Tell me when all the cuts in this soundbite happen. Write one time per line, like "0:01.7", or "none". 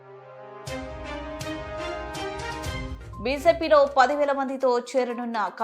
none